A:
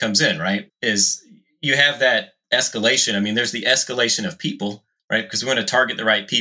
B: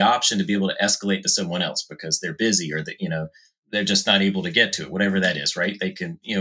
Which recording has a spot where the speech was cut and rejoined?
A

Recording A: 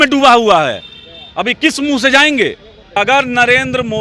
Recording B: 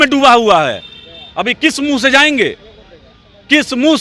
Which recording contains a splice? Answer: A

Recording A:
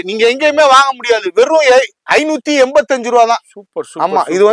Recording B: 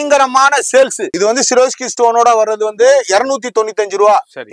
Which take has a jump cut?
B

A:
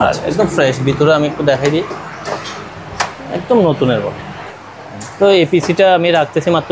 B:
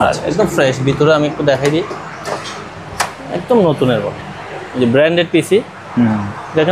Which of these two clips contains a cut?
A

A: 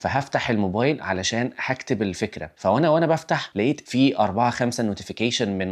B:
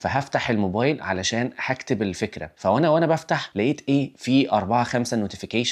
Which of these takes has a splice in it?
A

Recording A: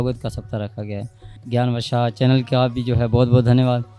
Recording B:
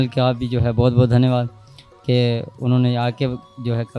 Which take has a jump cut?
A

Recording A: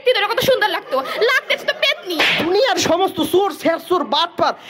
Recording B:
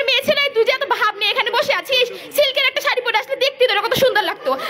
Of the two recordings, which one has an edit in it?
A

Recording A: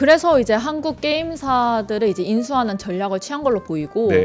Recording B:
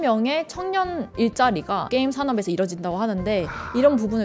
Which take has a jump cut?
B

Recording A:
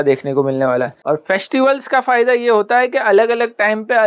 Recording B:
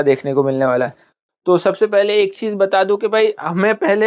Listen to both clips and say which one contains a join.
A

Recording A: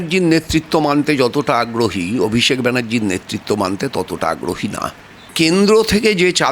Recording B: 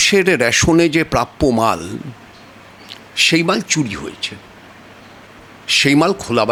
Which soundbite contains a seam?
A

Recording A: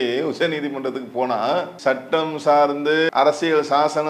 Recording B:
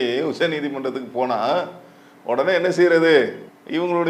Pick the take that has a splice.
A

